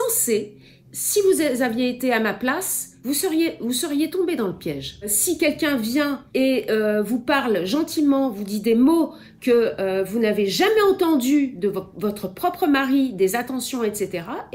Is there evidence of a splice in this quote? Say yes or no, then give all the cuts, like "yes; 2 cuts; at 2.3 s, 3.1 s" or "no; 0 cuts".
no; 0 cuts